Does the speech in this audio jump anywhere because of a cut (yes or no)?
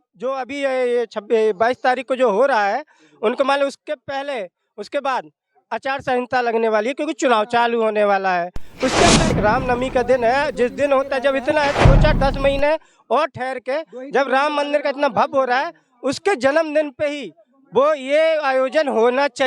yes